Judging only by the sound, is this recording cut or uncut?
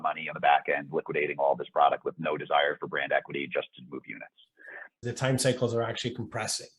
cut